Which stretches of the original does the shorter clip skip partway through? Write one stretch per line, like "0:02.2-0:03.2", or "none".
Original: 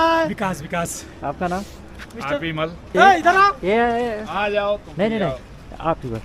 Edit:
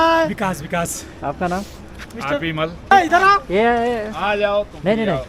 0:02.9-0:03.0

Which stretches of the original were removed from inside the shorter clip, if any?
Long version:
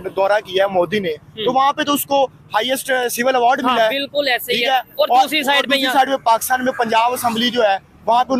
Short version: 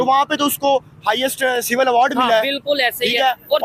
none

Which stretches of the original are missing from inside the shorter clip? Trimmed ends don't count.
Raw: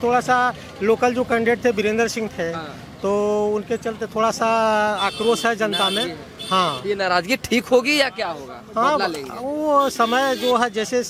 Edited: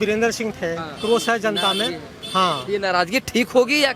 0:02.8-0:05.2

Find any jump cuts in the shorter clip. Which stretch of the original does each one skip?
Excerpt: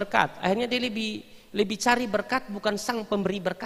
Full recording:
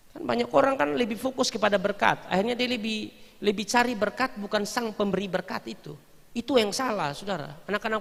none

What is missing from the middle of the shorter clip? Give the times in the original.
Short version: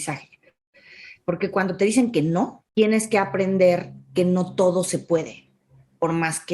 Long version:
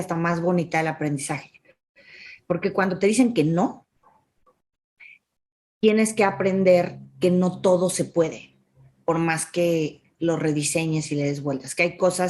0:03.8-0:05.7

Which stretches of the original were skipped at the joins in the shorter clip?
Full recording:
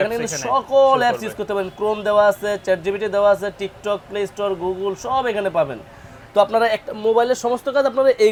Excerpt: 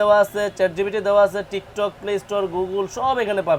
none

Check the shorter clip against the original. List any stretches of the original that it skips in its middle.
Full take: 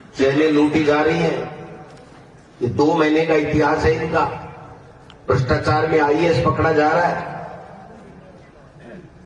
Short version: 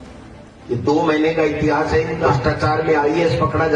0:04.2-0:05.3

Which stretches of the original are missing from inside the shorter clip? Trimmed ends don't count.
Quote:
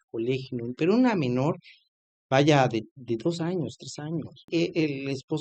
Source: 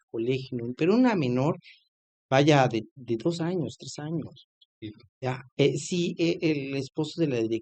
0:04.5-0:06.1

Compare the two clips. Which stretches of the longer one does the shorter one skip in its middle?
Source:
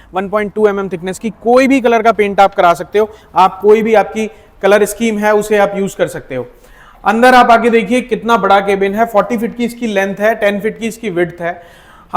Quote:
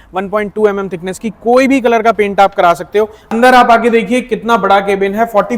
0:03.2-0:07.0

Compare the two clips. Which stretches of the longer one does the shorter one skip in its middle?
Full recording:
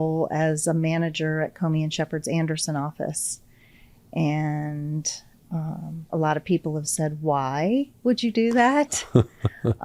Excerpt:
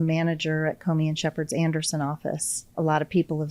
0:03.3-0:05.9

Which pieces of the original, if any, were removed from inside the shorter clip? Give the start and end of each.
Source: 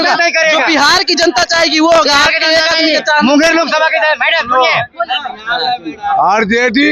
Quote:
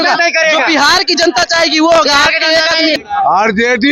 0:03.0-0:05.9

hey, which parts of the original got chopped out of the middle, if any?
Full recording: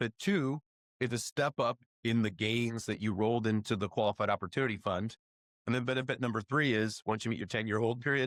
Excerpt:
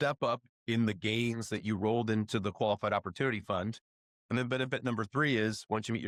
none

